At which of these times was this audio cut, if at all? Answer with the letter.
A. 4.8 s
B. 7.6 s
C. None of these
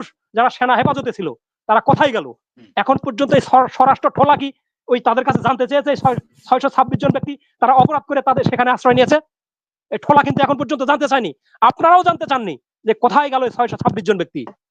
C